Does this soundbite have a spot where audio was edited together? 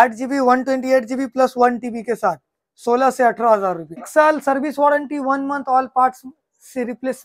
yes; 1 cut; at 4.1 s

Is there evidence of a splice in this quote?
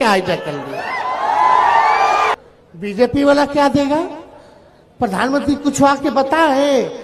yes; 1 cut; at 2.3 s

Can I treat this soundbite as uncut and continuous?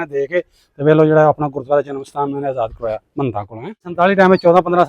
no; 1 cut; at 3.9 s

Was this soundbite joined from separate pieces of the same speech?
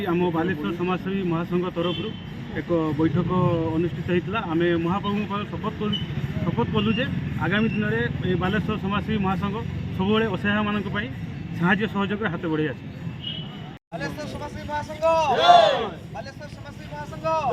yes; 1 cut; at 13.9 s

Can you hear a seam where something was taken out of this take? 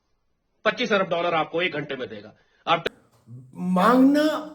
yes; 1 cut; at 2.8 s

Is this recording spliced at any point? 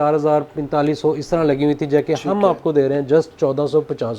no; 0 cuts

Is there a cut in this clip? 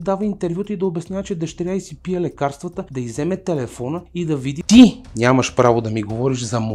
yes; 2 cuts; at 2.8 s, 4.2 s

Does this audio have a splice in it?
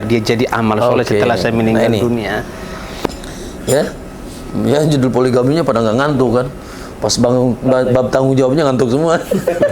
yes; 1 cut; at 3.1 s

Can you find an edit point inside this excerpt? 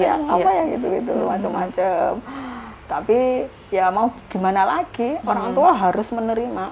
no; 0 cuts

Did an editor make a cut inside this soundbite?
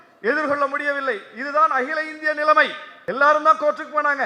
yes; 1 cut; at 2.9 s

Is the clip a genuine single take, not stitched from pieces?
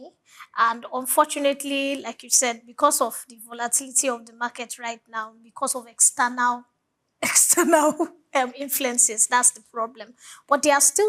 yes; 0 cuts

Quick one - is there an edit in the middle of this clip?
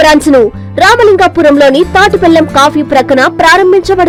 no; 0 cuts

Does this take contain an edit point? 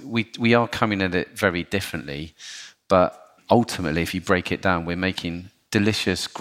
no; 0 cuts

